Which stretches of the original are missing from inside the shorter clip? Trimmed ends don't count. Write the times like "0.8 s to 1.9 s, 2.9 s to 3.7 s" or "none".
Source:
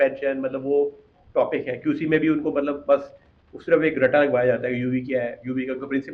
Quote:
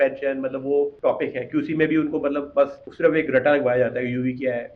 0.9 s to 1.3 s, 3.2 s to 3.5 s